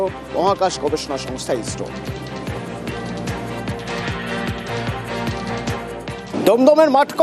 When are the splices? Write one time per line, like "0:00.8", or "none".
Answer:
0:06.2